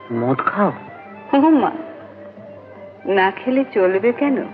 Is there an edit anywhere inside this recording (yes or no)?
no